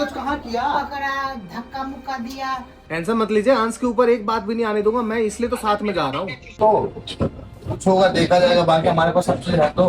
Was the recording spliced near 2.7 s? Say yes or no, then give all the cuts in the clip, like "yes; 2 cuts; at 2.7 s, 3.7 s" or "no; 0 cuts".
yes; 2 cuts; at 2.7 s, 6.6 s